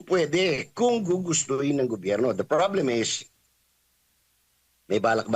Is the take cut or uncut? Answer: uncut